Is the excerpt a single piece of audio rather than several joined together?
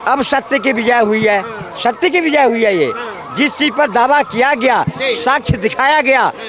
yes; 0 cuts

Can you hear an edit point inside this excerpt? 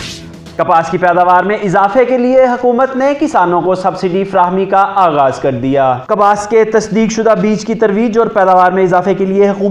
no; 0 cuts

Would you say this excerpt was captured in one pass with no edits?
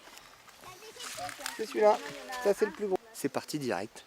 no; 1 cut; at 3.0 s

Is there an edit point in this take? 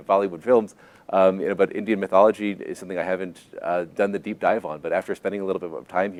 no; 0 cuts

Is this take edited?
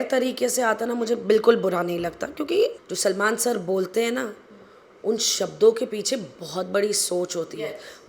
yes; 1 cut; at 2.8 s

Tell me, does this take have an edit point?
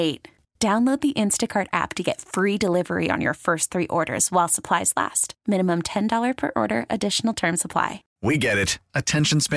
yes; 1 cut; at 8.1 s

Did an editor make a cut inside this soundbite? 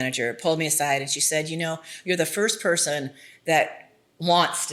no; 0 cuts

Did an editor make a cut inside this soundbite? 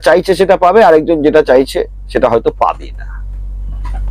no; 0 cuts

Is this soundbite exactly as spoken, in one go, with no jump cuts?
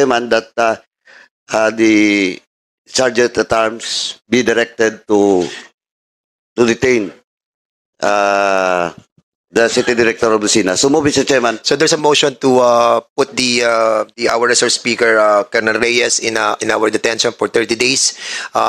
yes; 0 cuts

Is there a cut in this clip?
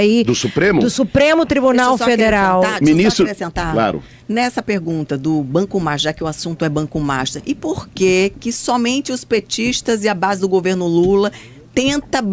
no; 0 cuts

